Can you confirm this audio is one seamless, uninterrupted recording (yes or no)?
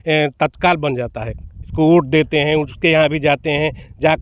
no